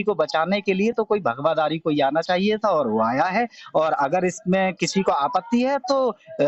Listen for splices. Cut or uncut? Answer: uncut